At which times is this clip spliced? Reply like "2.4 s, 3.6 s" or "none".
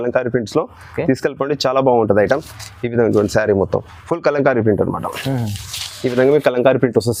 none